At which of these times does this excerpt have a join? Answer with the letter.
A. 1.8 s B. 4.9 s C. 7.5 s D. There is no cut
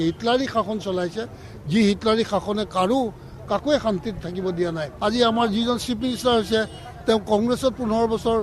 B